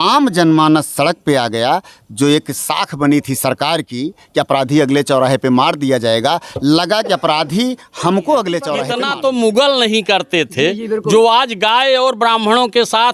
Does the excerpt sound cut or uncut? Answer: cut